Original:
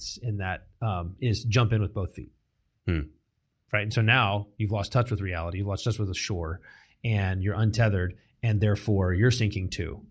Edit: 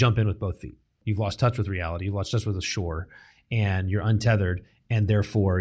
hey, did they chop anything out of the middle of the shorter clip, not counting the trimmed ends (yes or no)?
yes